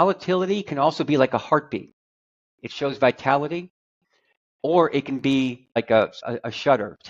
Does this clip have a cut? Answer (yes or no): yes